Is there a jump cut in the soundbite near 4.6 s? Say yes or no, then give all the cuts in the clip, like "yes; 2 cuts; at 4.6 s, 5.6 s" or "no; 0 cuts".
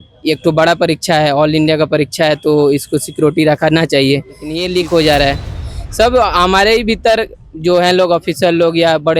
yes; 1 cut; at 4.6 s